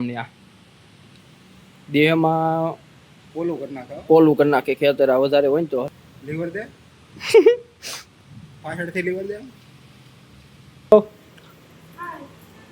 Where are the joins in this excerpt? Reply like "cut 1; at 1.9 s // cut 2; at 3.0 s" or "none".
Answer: cut 1; at 5.9 s // cut 2; at 10.9 s